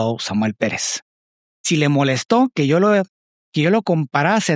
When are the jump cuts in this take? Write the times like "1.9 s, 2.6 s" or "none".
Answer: 1.6 s